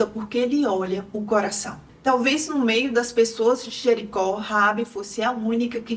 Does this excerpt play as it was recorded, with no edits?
yes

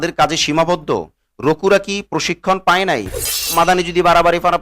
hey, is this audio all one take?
no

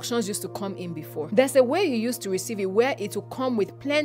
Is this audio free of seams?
no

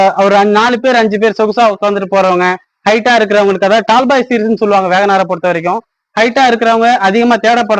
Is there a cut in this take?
no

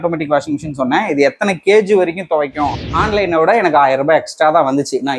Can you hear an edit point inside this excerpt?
yes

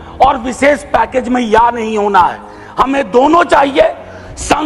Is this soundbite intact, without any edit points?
yes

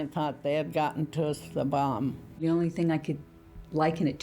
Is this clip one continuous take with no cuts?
no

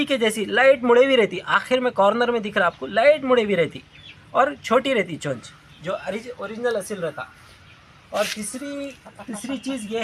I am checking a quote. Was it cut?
no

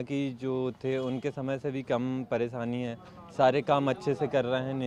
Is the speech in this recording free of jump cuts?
yes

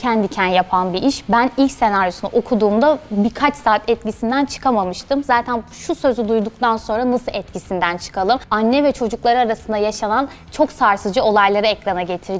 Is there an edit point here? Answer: no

